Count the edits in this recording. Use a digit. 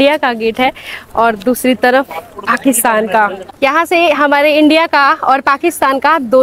1